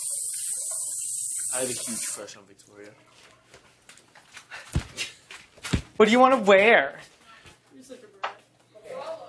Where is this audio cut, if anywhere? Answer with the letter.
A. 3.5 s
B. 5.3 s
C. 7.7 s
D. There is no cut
D